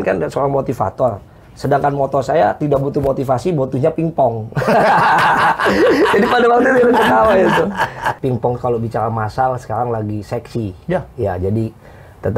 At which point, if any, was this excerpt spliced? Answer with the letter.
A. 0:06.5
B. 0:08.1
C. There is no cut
B